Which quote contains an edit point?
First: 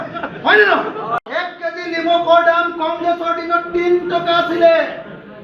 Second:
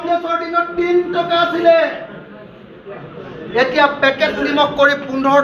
first; 1 cut; at 1.2 s

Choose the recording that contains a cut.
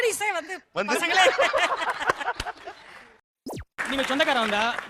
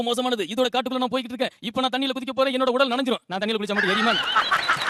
first; 1 cut; at 3.3 s

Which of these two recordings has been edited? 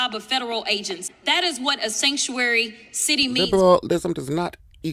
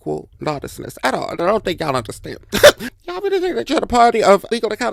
first; 2 cuts; at 1.1 s, 3.4 s

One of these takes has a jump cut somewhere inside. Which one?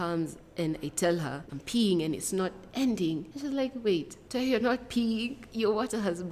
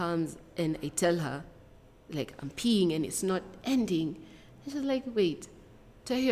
first; 4 cuts; at 1.5 s, 3.3 s, 4.2 s, 5.4 s

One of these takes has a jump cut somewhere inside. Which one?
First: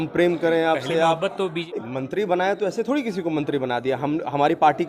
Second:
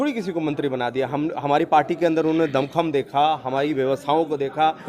first; 1 cut; at 1.6 s

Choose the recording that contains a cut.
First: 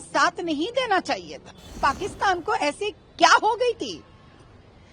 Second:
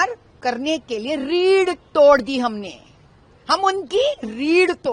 first; 1 cut; at 1.8 s

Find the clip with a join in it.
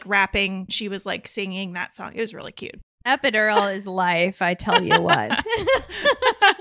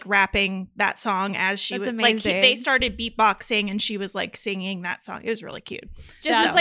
first; 2 cuts; at 0.7 s, 3.0 s

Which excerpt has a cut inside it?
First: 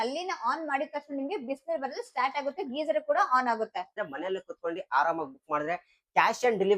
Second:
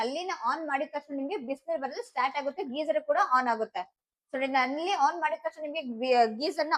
first; 1 cut; at 4.1 s

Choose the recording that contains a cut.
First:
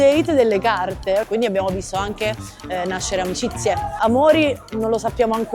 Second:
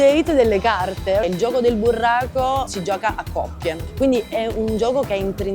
first; 1 cut; at 1.2 s

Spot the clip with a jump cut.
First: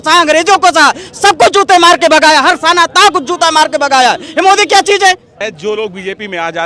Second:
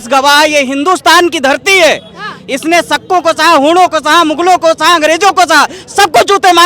first; 1 cut; at 5.4 s

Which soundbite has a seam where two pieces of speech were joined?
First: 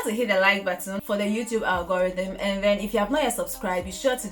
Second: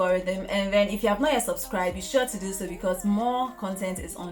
first; 1 cut; at 1.0 s

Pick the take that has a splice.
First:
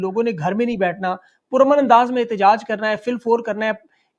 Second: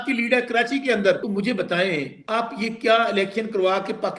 second; 2 cuts; at 1.2 s, 2.2 s

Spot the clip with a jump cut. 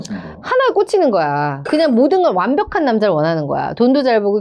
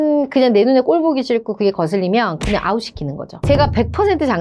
second; 1 cut; at 3.3 s

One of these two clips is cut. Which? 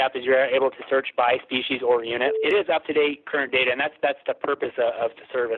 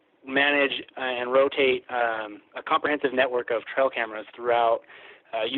first; 1 cut; at 2.4 s

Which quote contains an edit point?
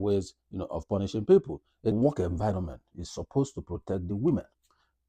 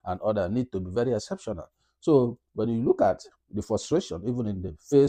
first; 1 cut; at 1.9 s

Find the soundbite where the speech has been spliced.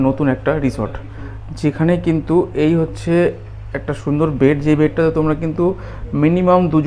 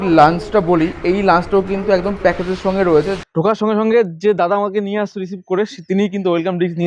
second; 1 cut; at 3.2 s

